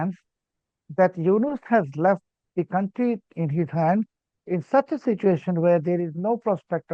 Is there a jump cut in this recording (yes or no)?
no